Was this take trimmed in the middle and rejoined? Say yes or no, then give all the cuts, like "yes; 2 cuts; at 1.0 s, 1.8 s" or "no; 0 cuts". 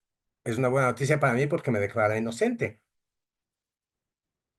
no; 0 cuts